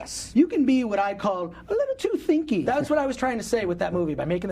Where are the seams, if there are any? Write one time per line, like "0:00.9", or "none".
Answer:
0:02.6